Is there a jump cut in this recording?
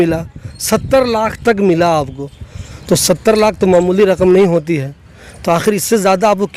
no; 0 cuts

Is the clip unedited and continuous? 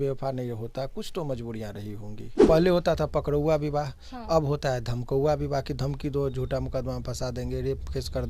no; 1 cut; at 2.4 s

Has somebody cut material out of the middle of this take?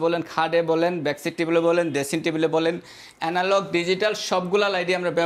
no; 0 cuts

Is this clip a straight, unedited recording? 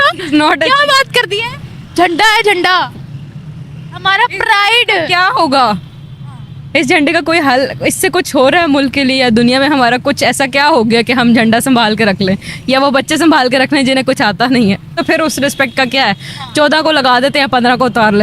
no; 1 cut; at 14.9 s

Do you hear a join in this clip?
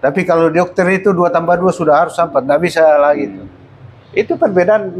no; 0 cuts

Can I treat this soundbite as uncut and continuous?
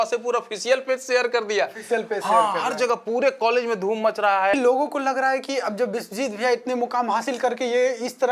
no; 1 cut; at 4.5 s

